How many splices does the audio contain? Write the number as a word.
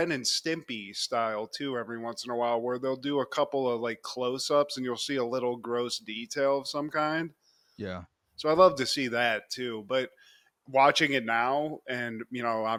zero